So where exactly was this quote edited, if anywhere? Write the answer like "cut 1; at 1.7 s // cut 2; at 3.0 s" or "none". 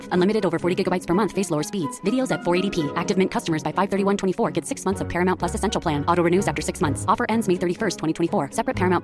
none